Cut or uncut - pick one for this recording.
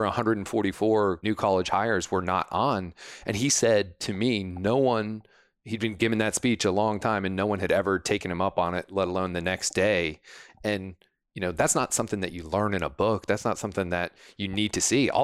cut